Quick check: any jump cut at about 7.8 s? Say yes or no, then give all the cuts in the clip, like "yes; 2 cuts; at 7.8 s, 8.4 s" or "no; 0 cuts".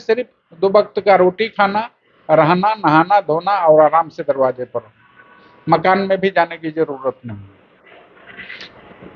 no; 0 cuts